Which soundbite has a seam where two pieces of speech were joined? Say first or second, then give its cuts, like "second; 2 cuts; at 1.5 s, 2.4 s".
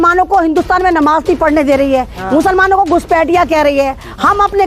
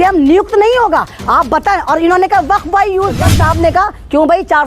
second; 1 cut; at 3.3 s